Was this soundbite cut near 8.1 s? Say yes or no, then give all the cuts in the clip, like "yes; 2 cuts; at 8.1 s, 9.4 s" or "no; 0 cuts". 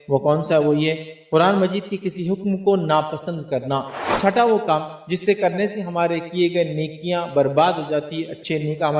no; 1 cut; at 4.1 s